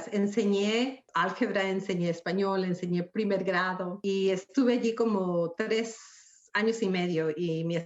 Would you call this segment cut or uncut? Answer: cut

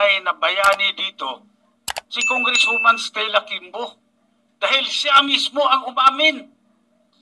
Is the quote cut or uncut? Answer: uncut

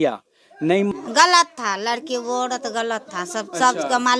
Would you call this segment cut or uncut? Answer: cut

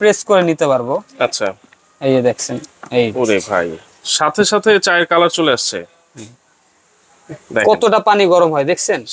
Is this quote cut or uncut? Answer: uncut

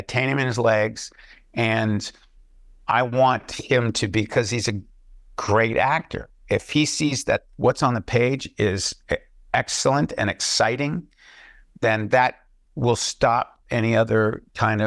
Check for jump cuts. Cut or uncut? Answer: uncut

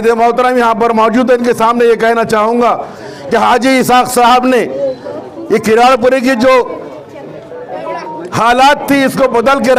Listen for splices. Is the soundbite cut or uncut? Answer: uncut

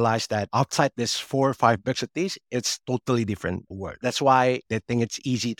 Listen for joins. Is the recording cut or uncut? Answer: cut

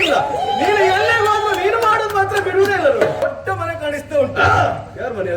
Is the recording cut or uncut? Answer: cut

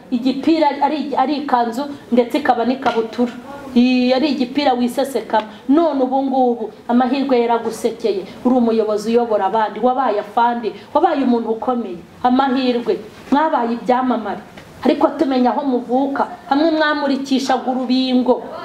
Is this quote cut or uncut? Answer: uncut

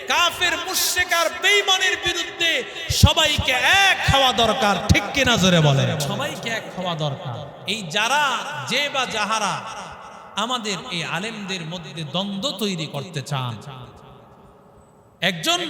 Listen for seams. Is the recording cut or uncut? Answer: cut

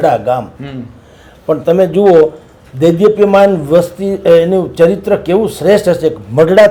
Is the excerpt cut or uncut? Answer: uncut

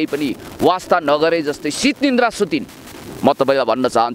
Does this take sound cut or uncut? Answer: uncut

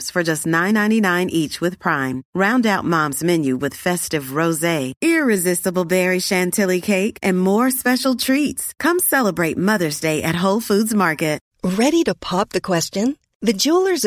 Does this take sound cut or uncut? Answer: cut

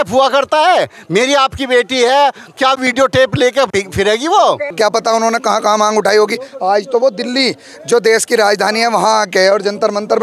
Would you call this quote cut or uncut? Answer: cut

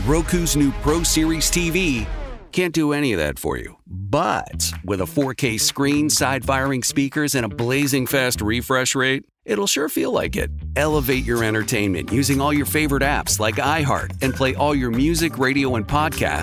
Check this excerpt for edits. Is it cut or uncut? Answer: uncut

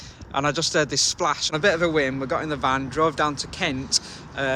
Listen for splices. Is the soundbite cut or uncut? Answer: cut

